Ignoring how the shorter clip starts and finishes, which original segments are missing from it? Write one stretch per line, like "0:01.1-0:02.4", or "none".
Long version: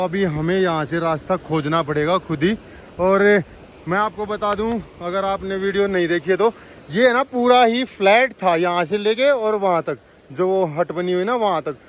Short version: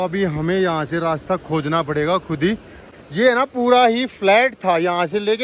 0:02.9-0:06.6

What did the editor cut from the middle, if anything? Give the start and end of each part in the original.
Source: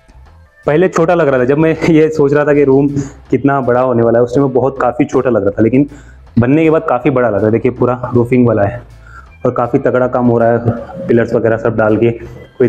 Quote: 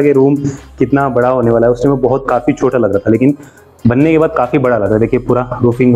none

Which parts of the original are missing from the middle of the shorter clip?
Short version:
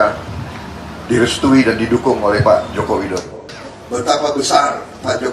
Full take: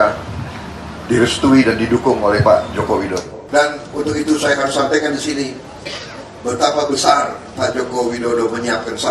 0:03.4-0:05.9

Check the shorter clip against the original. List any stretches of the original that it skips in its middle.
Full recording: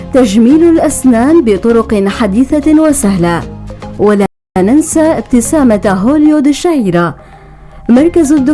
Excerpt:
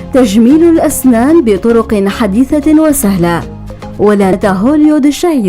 0:04.4-0:05.8

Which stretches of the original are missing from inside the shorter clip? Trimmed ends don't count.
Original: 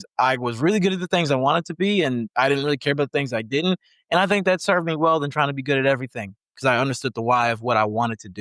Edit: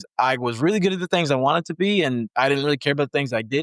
none

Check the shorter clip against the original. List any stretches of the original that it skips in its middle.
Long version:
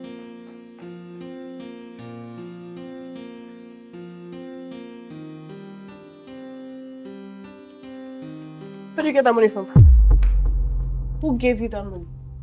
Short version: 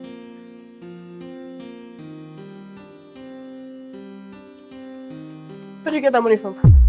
0:01.9-0:05.1

